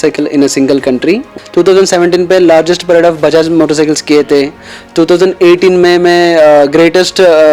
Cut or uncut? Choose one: cut